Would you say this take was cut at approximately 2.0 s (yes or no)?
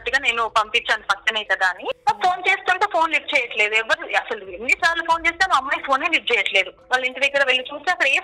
yes